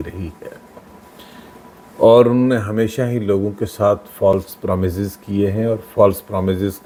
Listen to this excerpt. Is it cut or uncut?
uncut